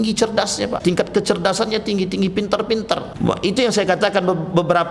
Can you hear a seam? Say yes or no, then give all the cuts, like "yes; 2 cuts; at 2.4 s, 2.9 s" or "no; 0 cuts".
yes; 2 cuts; at 0.8 s, 3.1 s